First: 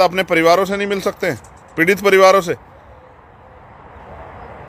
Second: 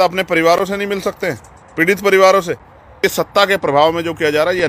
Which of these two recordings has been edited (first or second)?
second